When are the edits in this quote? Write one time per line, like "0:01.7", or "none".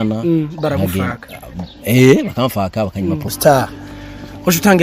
0:03.3